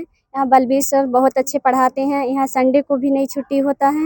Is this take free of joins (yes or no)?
yes